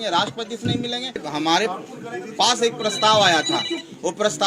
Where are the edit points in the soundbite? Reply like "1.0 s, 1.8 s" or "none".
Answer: 1.2 s